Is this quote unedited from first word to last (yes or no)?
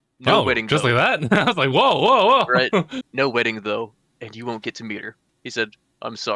no